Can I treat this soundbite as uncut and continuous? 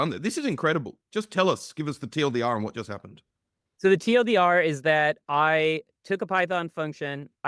yes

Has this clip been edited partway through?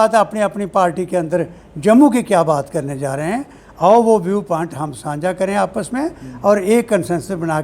no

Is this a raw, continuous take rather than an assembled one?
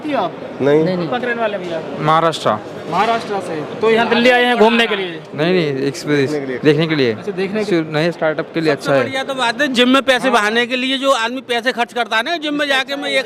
no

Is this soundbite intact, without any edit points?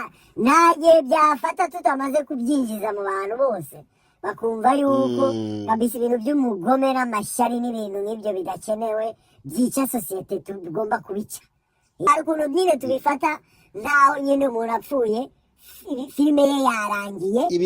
no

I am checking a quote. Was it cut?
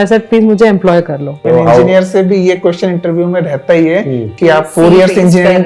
yes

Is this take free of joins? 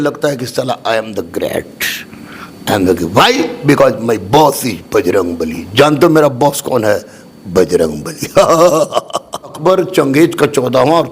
no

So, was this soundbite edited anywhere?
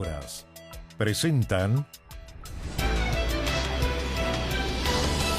no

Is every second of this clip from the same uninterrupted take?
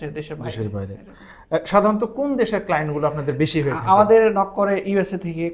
yes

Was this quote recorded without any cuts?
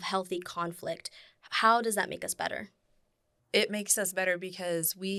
yes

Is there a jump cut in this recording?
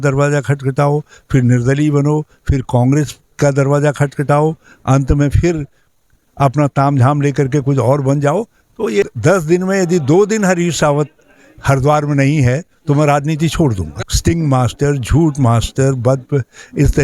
yes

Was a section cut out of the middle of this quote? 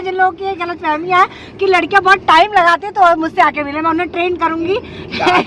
no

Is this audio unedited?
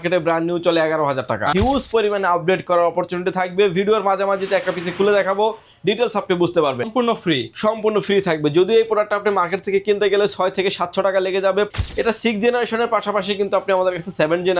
no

